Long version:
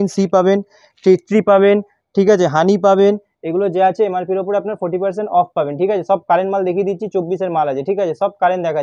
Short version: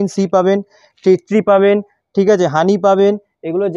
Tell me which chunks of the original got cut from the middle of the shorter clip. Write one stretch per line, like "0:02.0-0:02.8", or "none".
none

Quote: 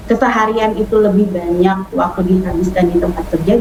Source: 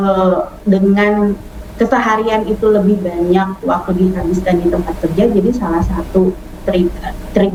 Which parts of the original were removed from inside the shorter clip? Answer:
none

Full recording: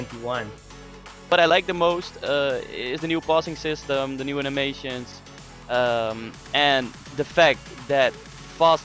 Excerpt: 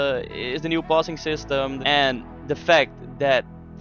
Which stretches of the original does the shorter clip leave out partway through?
0:04.1-0:06.4

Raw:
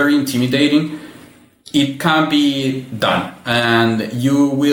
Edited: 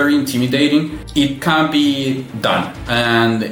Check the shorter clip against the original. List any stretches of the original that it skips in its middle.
0:01.0-0:01.6

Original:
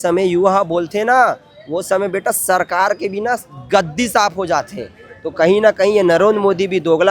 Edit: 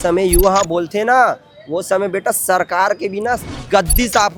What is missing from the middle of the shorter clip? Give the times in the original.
none

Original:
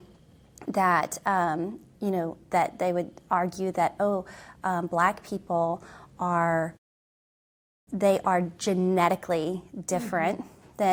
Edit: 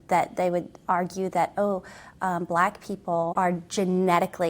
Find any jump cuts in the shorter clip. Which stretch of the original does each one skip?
0:05.8-0:08.2

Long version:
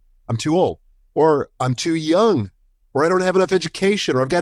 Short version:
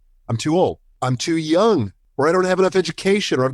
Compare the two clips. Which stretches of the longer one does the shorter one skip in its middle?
0:01.0-0:01.5
0:02.6-0:02.8

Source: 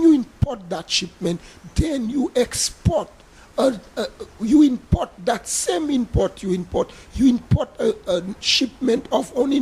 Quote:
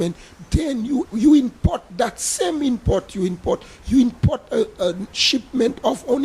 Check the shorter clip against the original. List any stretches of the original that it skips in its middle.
0:02.3-0:04.3

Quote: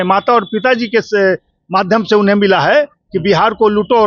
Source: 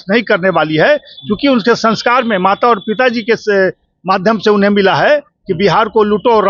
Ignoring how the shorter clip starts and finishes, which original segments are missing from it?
none

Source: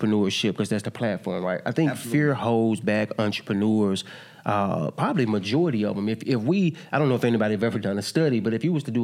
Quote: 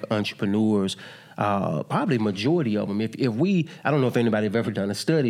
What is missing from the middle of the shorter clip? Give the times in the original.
none

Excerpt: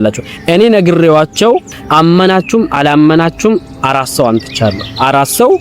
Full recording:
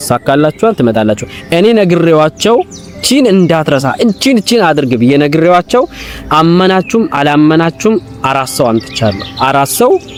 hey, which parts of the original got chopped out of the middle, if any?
0:02.8-0:06.2

